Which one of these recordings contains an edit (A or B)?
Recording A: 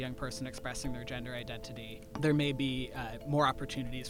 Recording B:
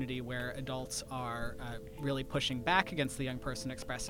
A